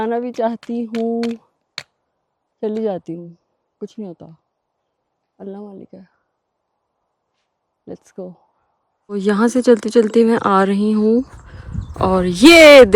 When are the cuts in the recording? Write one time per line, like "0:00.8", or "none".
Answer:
0:09.0